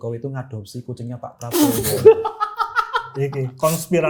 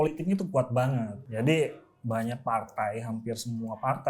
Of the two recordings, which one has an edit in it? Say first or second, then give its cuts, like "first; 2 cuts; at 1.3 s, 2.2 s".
second; 1 cut; at 1.2 s